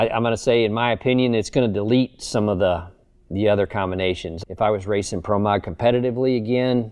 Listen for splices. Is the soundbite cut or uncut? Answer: cut